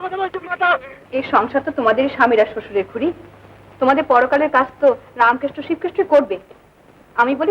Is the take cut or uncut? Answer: cut